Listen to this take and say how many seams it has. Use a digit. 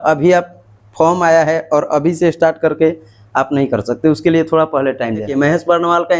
1